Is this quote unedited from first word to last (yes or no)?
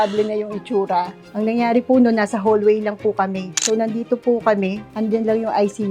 yes